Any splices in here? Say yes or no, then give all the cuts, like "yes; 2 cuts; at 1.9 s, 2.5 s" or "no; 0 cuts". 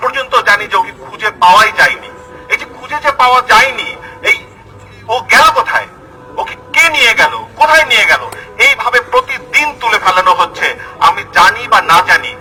no; 0 cuts